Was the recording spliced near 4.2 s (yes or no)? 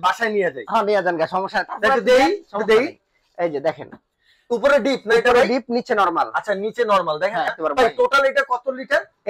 no